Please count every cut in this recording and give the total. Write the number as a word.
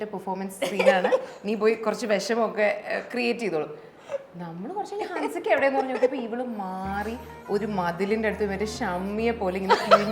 zero